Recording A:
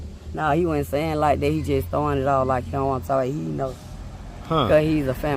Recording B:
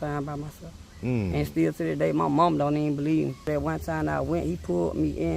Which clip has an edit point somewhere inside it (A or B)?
B